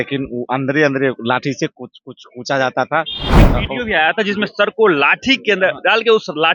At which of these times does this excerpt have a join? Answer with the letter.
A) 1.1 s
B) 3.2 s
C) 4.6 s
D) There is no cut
B